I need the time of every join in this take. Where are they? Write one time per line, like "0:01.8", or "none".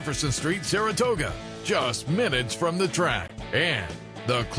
none